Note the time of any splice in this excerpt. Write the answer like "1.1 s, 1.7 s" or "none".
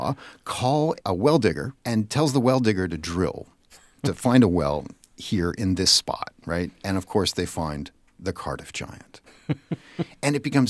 1.0 s, 1.7 s